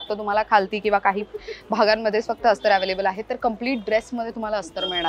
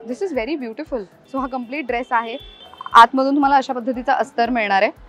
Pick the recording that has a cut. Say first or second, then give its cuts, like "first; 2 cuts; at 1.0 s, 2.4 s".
second; 2 cuts; at 1.2 s, 2.5 s